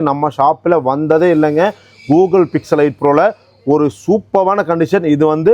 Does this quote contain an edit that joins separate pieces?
no; 0 cuts

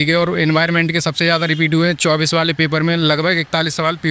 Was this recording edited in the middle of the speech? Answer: no; 0 cuts

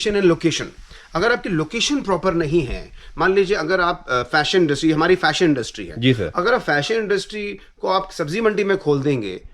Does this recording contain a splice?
no; 0 cuts

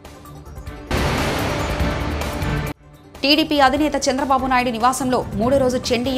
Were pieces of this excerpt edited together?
no; 0 cuts

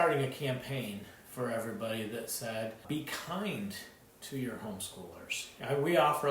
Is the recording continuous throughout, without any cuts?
no; 2 cuts; at 2.8 s, 5.5 s

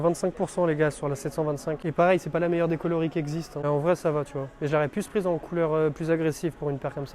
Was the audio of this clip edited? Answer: no; 0 cuts

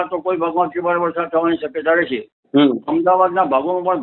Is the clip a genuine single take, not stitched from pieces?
yes; 0 cuts

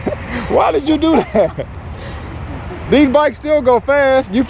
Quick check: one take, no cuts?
yes; 0 cuts

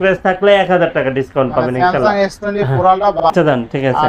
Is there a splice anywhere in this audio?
yes; 1 cut; at 3.2 s

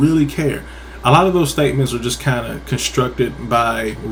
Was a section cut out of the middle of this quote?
no; 0 cuts

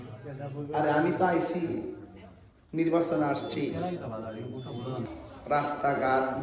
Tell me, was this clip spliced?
yes; 1 cut; at 5.1 s

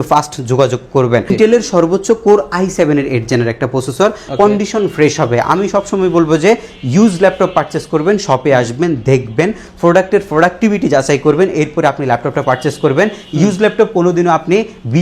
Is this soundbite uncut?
no; 2 cuts; at 1.3 s, 4.2 s

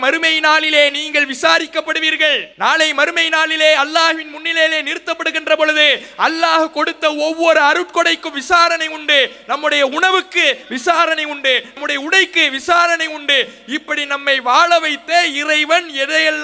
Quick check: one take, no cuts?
no; 1 cut; at 2.5 s

